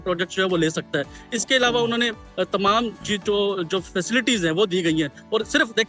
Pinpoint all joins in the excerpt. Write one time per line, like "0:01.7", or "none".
none